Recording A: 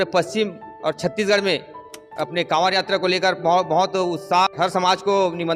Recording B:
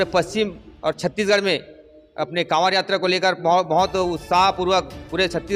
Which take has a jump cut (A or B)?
A